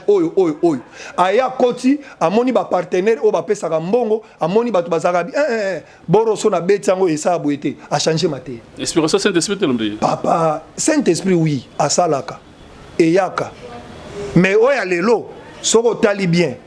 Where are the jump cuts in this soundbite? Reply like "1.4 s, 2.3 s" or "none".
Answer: none